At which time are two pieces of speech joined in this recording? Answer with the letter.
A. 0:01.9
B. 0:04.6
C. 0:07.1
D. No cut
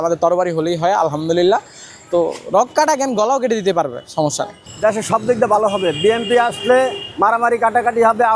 B